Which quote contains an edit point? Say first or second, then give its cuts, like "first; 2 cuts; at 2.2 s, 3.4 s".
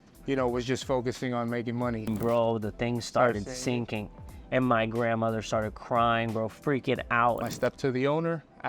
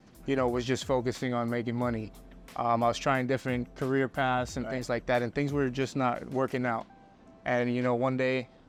first; 2 cuts; at 2.1 s, 7.4 s